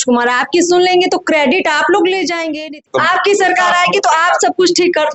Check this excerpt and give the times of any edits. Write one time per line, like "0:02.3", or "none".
0:02.8